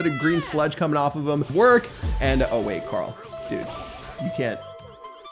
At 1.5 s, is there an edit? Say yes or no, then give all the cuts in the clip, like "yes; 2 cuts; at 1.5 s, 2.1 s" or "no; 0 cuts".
yes; 1 cut; at 1.5 s